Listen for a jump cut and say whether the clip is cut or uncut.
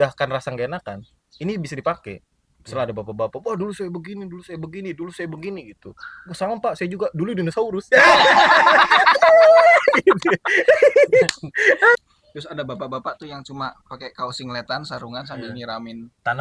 cut